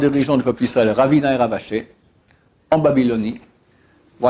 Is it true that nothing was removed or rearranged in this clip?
yes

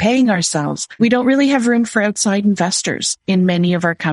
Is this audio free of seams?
no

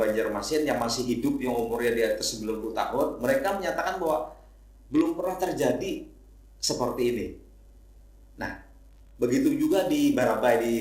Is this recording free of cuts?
yes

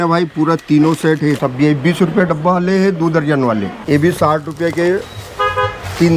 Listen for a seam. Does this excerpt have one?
yes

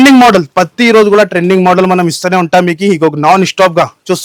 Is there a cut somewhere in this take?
no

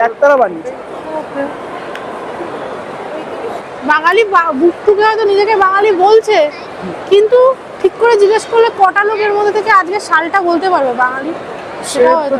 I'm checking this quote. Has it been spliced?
yes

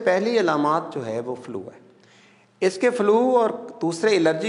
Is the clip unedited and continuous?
yes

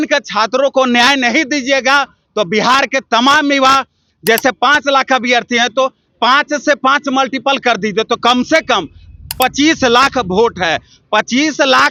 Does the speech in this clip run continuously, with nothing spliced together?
yes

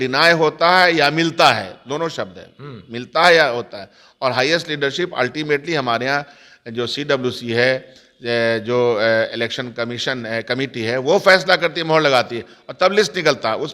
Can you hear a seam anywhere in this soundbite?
no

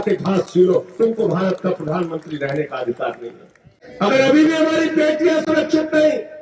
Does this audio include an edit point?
no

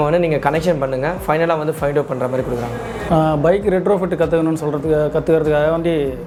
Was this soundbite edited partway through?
no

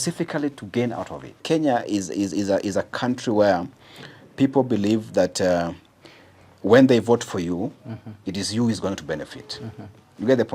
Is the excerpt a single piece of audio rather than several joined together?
no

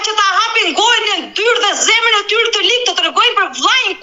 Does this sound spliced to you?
no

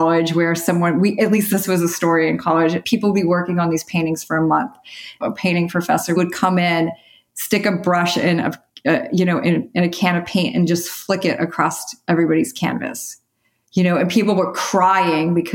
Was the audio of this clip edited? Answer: yes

